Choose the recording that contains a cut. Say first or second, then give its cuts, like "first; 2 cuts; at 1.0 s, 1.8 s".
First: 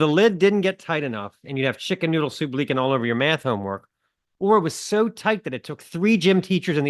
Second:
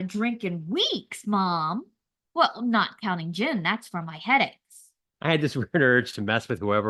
second; 1 cut; at 5.0 s